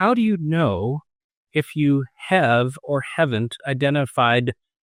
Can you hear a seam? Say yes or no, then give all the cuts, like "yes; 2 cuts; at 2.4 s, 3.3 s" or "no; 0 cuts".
no; 0 cuts